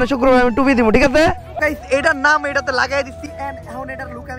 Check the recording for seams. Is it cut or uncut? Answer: cut